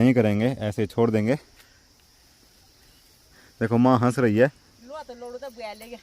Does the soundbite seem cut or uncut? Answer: cut